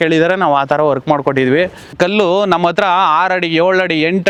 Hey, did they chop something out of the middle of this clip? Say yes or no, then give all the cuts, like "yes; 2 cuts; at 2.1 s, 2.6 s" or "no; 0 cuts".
no; 0 cuts